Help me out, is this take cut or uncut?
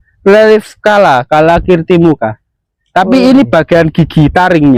uncut